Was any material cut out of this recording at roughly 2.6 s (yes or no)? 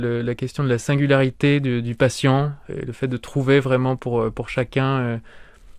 yes